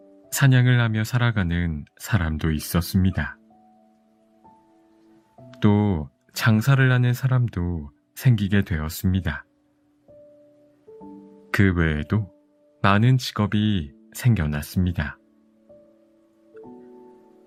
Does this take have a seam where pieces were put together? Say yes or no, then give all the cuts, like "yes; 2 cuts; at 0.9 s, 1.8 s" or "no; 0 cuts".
no; 0 cuts